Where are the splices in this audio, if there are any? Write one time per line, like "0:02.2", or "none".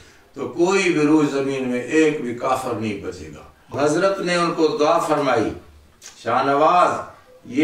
0:03.7